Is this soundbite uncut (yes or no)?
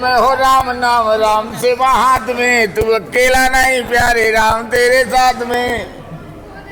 yes